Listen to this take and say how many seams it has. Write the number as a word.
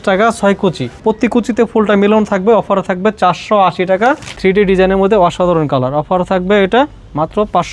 two